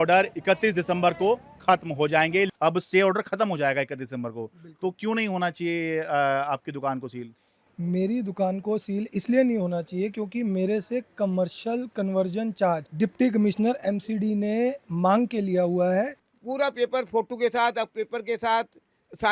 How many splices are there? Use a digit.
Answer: 3